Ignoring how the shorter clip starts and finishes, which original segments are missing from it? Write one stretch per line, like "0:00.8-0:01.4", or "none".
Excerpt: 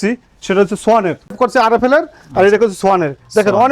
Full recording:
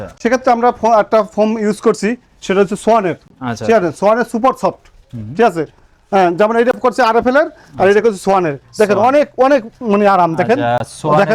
0:03.3-0:06.8